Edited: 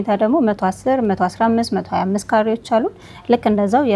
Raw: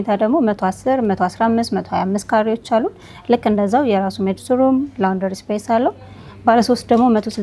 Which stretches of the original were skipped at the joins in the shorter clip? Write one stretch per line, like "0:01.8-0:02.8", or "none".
none